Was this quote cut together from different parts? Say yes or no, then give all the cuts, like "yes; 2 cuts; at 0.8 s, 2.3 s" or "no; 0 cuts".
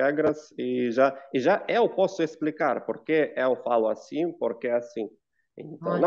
no; 0 cuts